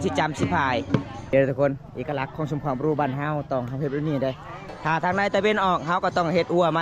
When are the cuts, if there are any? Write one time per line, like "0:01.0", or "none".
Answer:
0:01.3
0:04.6